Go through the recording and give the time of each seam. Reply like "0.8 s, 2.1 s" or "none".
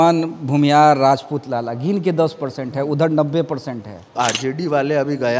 4.1 s

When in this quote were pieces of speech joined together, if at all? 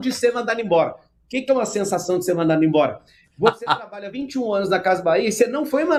none

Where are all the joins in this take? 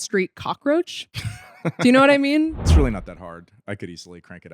2.6 s

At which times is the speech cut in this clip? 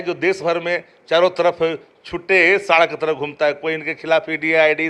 none

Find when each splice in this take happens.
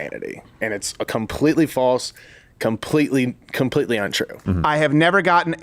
4.3 s

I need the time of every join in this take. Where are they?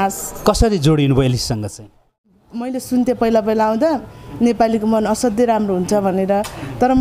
2.4 s

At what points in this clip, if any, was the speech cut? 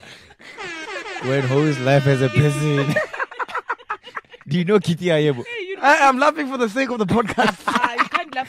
none

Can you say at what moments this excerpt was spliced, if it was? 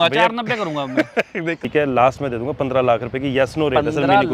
1.6 s

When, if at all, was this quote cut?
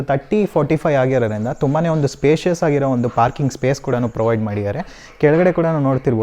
none

